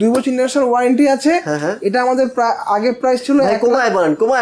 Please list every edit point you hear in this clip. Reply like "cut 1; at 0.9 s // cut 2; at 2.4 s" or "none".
none